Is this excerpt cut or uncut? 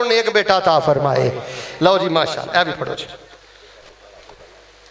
uncut